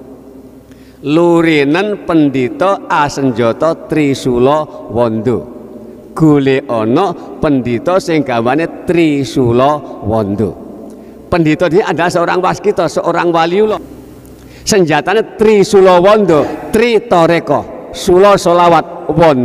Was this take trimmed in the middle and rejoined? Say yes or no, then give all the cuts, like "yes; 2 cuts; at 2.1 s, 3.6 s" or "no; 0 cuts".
yes; 2 cuts; at 13.8 s, 16.6 s